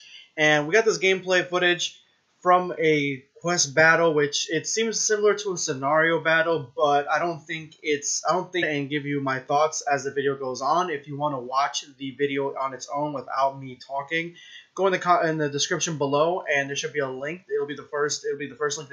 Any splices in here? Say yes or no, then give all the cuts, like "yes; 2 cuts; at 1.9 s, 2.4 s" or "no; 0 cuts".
no; 0 cuts